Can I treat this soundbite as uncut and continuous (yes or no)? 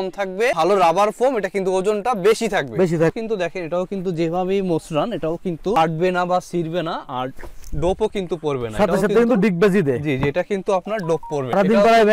no